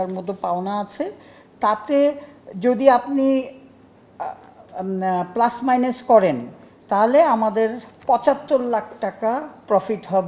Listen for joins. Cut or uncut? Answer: uncut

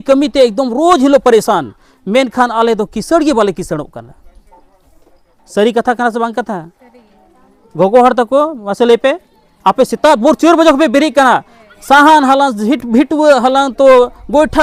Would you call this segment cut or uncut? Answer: uncut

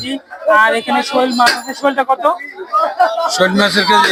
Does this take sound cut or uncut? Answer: uncut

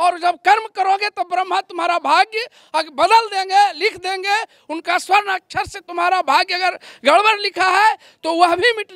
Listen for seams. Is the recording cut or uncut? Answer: uncut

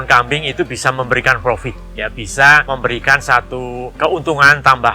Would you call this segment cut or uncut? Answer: cut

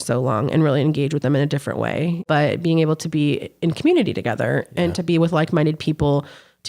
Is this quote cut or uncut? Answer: cut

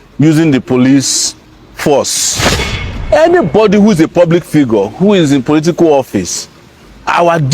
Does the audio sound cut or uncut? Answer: cut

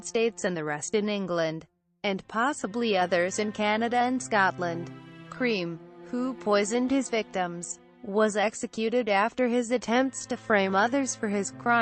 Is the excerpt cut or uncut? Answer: uncut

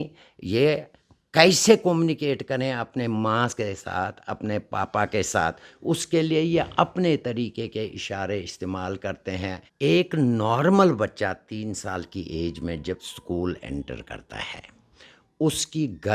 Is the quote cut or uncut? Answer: cut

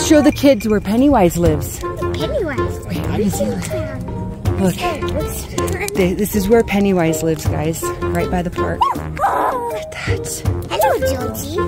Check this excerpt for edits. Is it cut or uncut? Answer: uncut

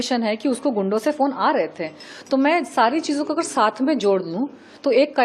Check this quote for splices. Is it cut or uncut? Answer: uncut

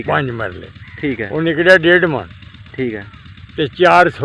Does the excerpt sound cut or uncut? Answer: uncut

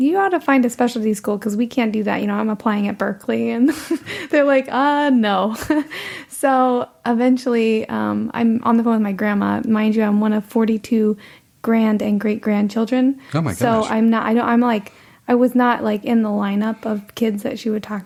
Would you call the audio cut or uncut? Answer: uncut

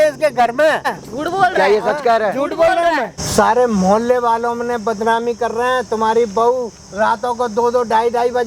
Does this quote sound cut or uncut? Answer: cut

